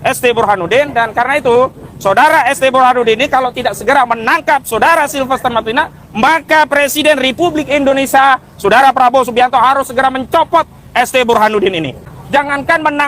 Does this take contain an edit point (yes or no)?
yes